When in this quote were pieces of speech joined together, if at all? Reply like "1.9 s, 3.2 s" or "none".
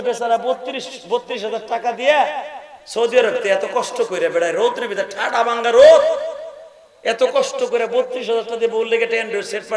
none